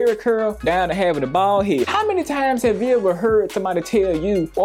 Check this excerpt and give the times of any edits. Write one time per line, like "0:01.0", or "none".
0:01.9